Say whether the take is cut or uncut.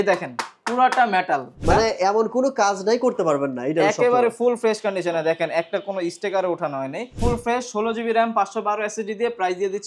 cut